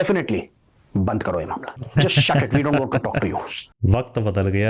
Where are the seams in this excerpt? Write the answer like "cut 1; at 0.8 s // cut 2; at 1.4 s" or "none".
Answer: cut 1; at 1.8 s